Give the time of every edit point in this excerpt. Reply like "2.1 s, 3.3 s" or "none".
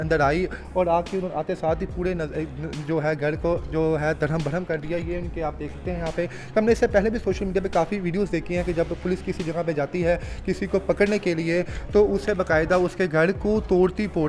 none